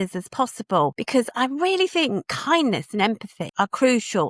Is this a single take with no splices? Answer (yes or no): no